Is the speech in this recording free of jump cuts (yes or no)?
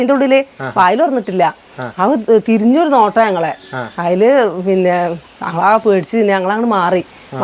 yes